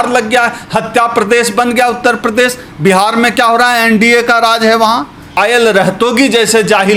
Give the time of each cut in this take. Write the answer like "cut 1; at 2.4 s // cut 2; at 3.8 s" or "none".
cut 1; at 5.4 s